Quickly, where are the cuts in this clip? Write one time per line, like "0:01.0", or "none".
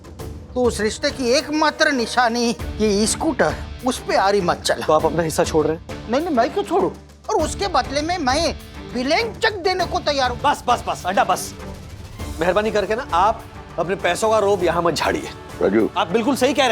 0:04.8
0:07.1
0:10.3
0:15.8